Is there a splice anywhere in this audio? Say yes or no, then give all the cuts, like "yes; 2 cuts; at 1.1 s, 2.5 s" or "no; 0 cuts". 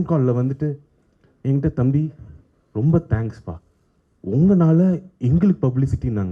no; 0 cuts